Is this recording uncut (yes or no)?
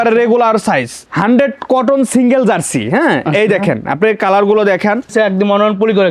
no